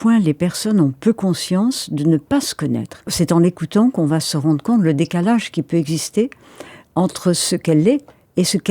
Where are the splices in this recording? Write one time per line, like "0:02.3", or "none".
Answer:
0:03.1
0:07.6